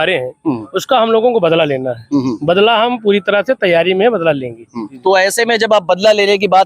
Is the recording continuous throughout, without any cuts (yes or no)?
no